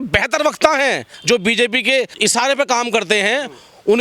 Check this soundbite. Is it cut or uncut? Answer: uncut